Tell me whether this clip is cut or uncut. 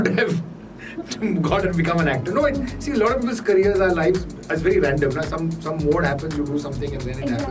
uncut